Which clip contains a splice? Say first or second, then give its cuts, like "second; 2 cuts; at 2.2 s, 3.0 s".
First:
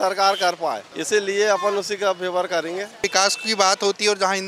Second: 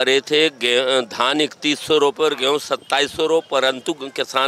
first; 2 cuts; at 0.9 s, 3.0 s